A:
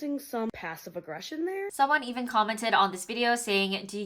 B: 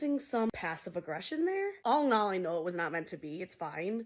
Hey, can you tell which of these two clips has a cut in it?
A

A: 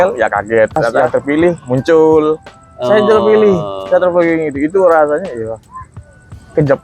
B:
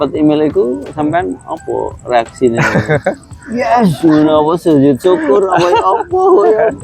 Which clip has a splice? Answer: A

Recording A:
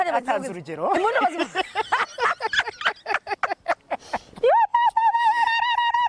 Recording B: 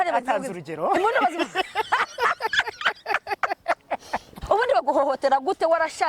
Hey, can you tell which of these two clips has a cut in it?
B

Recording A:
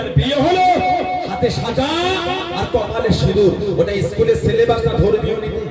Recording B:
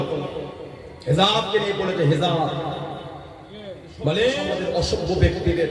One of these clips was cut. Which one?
B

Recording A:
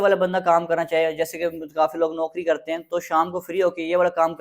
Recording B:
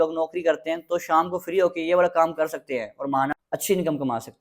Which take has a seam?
B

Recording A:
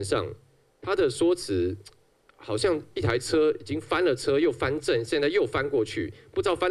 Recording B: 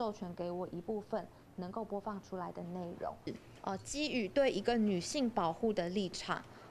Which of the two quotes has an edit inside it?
B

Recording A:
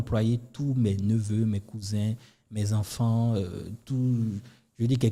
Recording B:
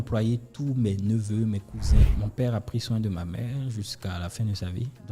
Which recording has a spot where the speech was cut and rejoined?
B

